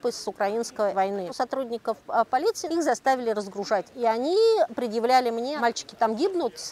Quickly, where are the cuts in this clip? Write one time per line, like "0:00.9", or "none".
0:01.3
0:02.6
0:03.9
0:05.5